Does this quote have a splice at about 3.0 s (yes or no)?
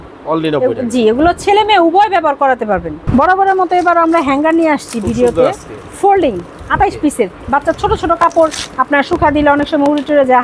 yes